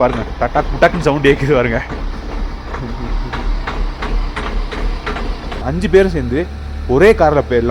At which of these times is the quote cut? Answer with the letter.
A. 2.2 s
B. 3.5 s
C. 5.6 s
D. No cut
C